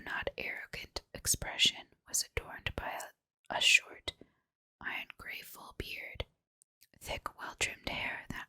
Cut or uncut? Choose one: cut